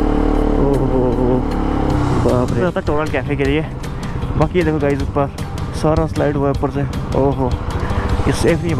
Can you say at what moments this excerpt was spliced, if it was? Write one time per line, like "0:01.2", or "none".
0:02.6